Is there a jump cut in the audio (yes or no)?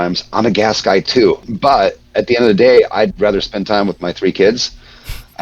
yes